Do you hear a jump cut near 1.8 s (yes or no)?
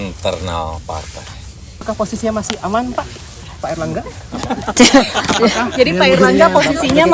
yes